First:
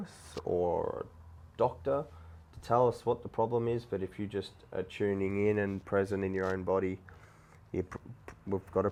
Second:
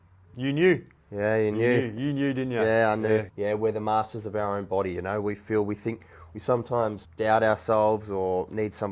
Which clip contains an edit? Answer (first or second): second